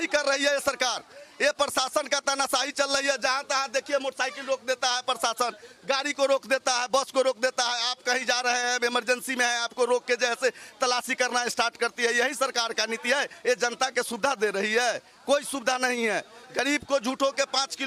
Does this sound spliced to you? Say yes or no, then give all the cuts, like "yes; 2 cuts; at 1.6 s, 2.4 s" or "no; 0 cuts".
no; 0 cuts